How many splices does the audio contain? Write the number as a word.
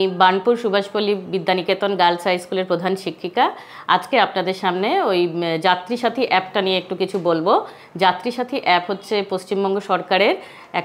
zero